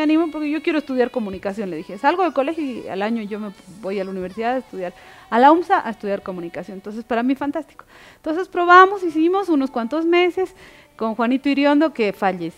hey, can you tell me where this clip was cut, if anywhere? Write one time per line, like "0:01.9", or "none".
none